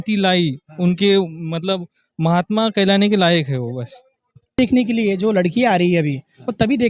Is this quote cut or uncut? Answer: cut